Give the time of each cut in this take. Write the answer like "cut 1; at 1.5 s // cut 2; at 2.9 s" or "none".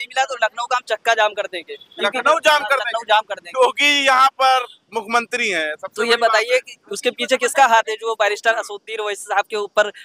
none